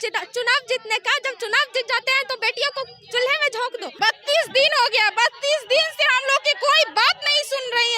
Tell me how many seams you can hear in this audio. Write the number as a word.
one